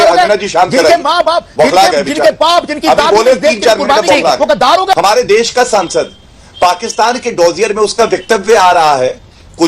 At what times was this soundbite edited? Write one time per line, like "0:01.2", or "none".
0:04.9